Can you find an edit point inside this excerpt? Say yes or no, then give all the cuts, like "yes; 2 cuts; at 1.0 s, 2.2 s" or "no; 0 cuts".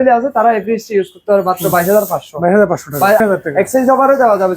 yes; 1 cut; at 3.2 s